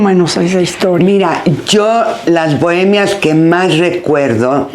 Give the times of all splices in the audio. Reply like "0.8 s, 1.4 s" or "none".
none